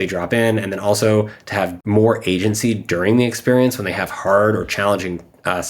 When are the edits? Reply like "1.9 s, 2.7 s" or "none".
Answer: 1.8 s